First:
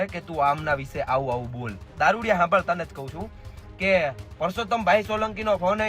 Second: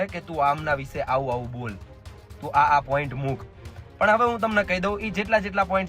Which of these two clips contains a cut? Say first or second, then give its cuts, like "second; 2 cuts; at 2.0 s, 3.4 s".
first; 1 cut; at 1.8 s